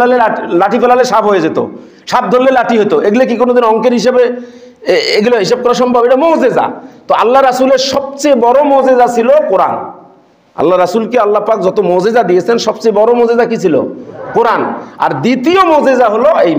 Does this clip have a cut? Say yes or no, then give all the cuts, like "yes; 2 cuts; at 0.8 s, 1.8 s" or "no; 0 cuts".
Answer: no; 0 cuts